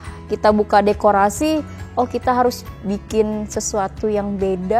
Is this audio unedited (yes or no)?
yes